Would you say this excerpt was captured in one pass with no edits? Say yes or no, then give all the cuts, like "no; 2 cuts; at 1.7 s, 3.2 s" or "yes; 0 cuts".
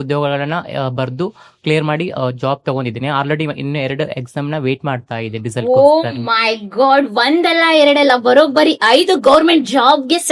yes; 0 cuts